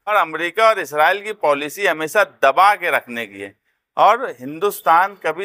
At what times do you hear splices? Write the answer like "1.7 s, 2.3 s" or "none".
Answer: none